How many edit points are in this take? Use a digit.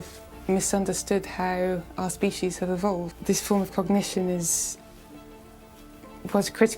1